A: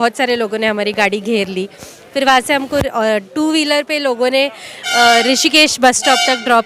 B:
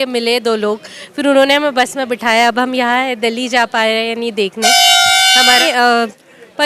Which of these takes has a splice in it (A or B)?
B